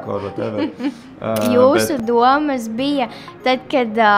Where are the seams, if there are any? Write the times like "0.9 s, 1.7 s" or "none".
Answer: 1.5 s